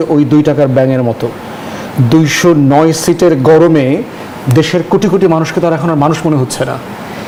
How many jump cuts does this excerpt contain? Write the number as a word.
zero